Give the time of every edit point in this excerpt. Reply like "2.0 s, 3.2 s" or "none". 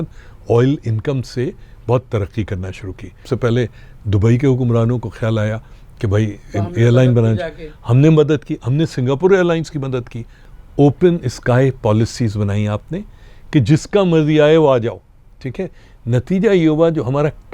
3.2 s, 10.4 s